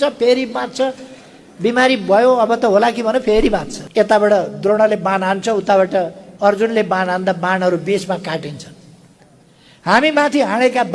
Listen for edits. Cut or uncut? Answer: cut